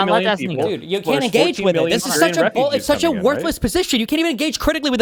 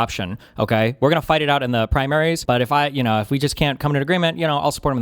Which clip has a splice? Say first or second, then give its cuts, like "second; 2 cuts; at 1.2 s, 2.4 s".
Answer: second; 1 cut; at 2.4 s